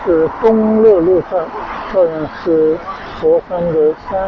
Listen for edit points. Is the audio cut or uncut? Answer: uncut